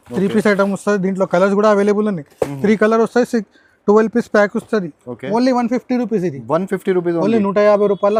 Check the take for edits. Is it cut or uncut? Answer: uncut